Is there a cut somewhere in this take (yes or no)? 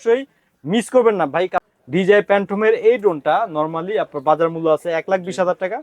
yes